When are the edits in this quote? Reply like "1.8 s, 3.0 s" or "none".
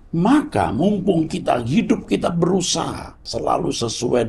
3.3 s